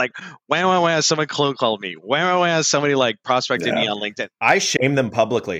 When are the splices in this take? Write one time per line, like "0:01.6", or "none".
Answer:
0:04.2